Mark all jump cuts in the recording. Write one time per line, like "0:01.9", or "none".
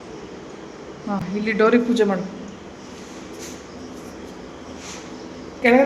none